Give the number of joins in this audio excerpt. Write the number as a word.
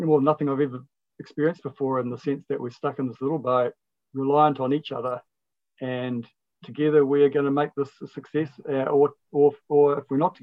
zero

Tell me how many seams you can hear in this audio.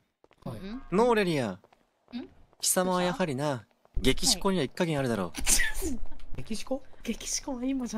one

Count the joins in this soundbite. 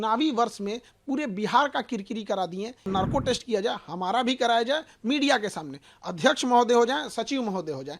one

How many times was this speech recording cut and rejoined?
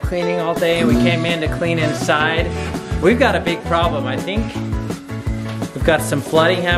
zero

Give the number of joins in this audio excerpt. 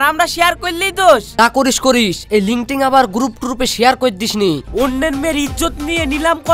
two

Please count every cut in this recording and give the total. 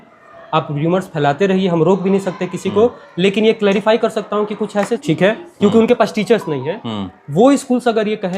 one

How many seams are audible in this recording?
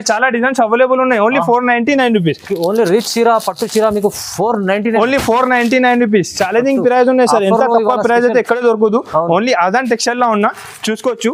zero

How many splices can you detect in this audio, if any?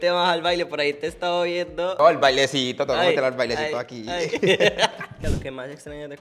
two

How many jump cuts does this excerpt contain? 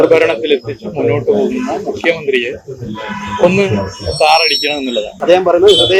one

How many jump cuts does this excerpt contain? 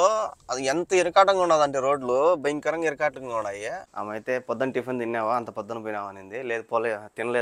one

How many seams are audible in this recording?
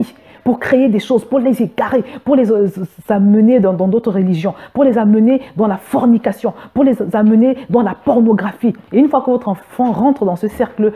one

